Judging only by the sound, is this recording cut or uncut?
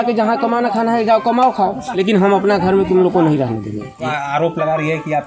cut